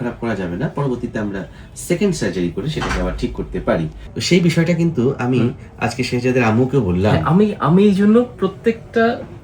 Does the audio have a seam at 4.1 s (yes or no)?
yes